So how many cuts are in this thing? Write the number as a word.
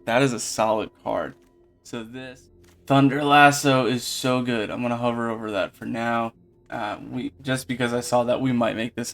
one